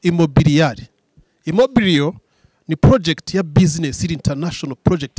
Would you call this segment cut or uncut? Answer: uncut